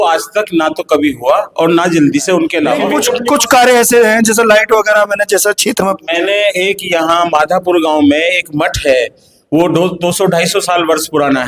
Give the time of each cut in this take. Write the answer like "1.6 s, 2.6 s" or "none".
2.8 s